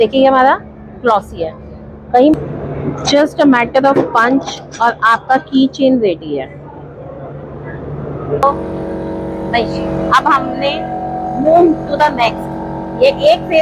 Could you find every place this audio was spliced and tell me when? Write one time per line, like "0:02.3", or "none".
0:02.4
0:08.4

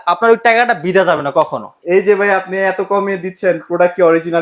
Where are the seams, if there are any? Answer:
0:01.7

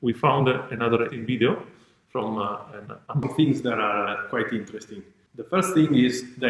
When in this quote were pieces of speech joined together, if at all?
0:03.2

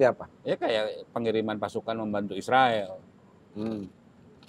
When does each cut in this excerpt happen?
none

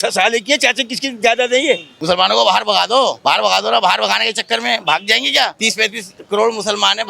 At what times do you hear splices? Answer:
0:01.9
0:03.2
0:05.6

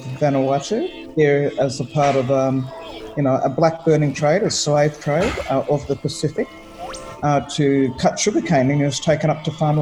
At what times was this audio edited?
0:01.0

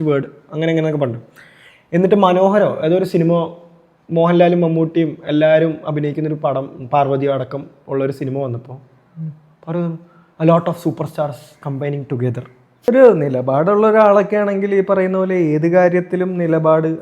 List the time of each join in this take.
0:12.8

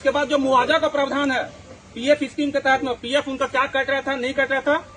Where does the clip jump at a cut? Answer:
none

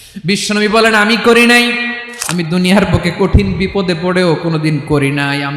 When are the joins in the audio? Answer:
0:02.0

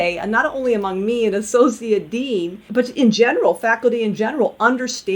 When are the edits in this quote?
0:02.6

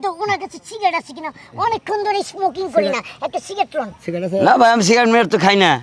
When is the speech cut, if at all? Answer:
none

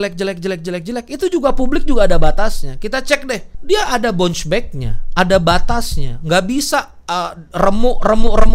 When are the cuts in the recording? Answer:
0:03.5

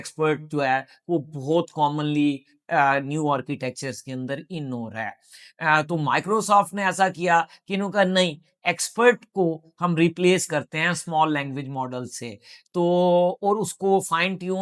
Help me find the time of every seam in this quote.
none

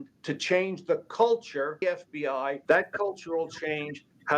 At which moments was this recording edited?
0:01.9

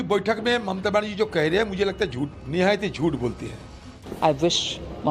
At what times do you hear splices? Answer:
0:02.4
0:03.8

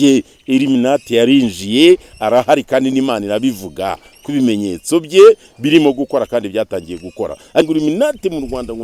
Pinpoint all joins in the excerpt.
0:07.7

